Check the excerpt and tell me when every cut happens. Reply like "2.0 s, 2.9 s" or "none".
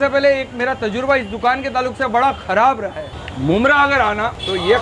3.0 s